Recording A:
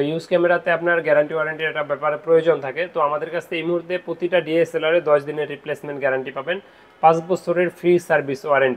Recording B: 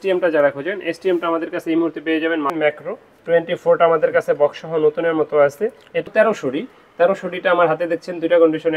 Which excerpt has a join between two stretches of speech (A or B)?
B